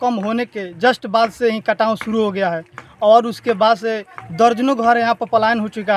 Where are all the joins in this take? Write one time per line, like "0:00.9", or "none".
none